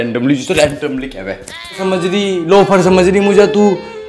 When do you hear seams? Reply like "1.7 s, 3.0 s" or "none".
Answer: 1.8 s